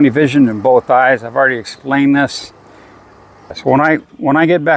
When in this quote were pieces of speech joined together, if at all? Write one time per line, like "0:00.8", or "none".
0:03.6